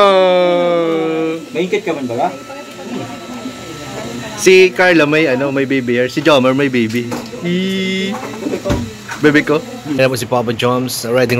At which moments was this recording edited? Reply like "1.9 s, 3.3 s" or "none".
10.0 s